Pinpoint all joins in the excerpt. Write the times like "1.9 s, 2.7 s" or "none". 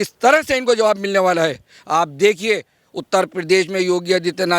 1.7 s